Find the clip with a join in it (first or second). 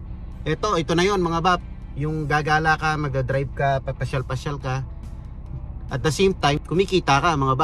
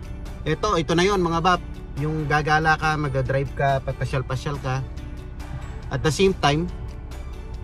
first